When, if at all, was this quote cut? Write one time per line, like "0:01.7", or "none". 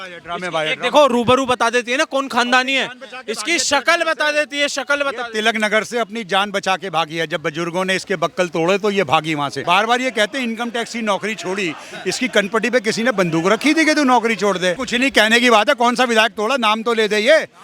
0:09.6
0:14.8